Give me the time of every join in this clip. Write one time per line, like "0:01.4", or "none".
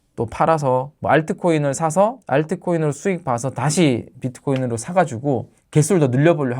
0:00.9